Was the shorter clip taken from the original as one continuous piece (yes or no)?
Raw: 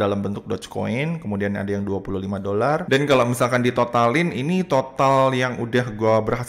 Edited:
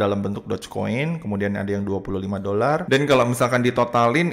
yes